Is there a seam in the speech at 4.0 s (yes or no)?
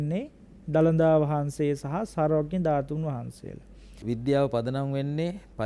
yes